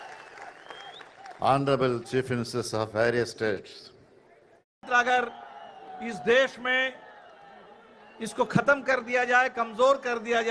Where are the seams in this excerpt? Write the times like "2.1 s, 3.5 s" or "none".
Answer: 4.9 s